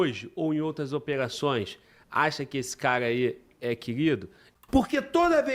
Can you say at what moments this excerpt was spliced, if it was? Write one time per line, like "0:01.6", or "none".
0:04.4